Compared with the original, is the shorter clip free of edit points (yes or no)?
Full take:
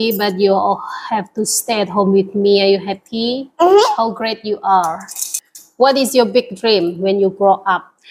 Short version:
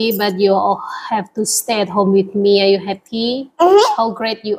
yes